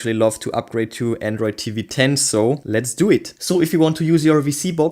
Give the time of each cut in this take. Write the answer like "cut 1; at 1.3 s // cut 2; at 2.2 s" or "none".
cut 1; at 3.4 s